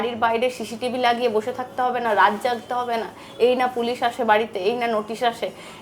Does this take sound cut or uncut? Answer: uncut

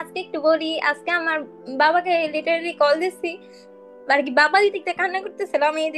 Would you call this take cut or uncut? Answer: uncut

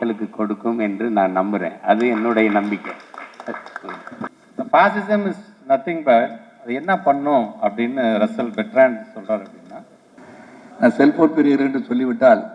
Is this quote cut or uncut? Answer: cut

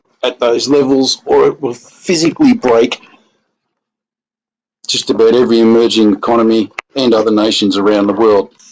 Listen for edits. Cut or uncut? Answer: cut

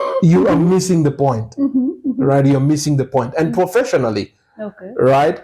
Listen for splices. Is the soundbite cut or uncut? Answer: uncut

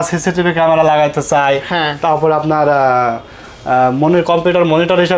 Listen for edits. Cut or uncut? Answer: uncut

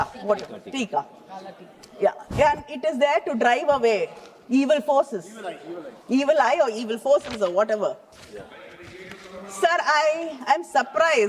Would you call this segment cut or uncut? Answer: uncut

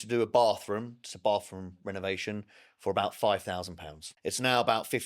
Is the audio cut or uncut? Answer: cut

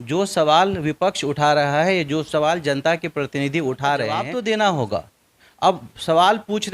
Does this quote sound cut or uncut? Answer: cut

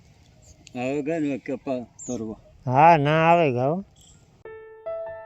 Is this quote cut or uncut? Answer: uncut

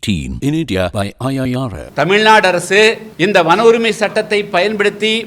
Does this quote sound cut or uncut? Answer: cut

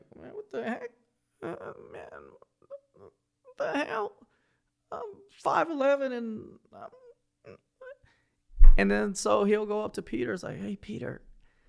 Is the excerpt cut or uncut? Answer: uncut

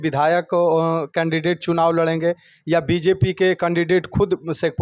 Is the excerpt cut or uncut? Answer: uncut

